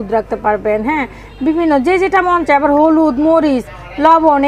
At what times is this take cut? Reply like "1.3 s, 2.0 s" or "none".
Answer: none